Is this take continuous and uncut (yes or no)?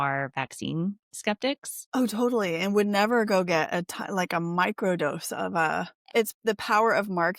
no